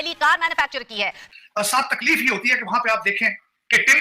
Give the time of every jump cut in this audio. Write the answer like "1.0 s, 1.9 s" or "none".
1.2 s